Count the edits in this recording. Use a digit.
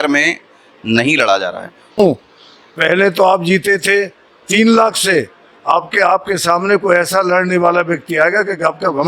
1